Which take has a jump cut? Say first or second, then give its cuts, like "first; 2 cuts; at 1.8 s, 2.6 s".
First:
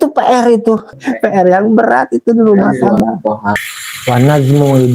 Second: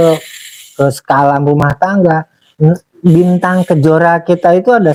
first; 2 cuts; at 1.0 s, 3.6 s